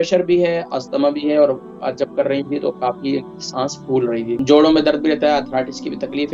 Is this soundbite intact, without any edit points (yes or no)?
no